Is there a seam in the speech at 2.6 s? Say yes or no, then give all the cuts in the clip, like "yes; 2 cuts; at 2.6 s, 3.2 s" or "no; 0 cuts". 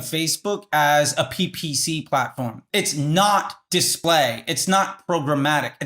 no; 1 cut; at 3.9 s